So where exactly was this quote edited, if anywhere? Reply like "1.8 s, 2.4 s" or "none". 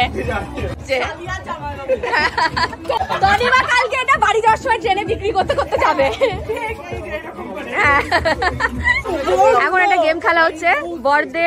0.8 s, 3.0 s, 9.1 s